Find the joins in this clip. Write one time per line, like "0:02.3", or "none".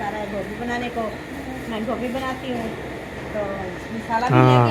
none